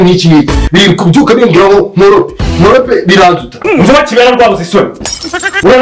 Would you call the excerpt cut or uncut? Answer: cut